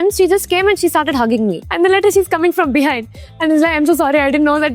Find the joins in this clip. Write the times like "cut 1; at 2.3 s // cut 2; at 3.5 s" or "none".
cut 1; at 1.6 s